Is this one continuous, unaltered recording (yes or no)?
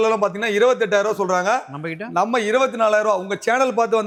yes